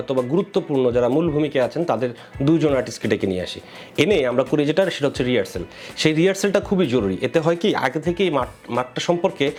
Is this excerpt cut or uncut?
uncut